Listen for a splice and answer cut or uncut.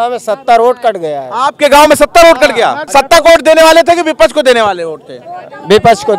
cut